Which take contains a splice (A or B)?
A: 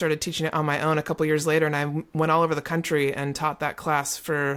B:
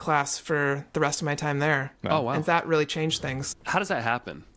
B